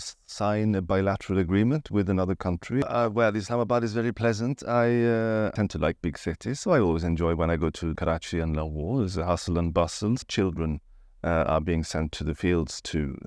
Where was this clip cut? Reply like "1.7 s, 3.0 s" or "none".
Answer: 2.8 s, 5.5 s, 8.0 s, 10.2 s